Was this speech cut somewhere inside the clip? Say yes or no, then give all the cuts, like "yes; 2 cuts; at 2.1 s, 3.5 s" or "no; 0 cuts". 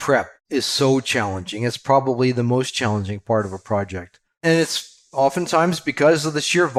no; 0 cuts